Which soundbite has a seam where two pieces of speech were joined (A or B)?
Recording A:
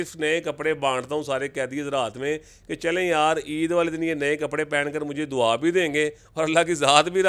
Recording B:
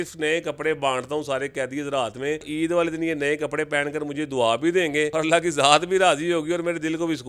B